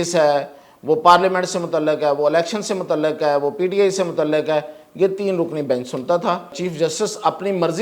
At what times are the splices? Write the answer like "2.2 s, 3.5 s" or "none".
6.6 s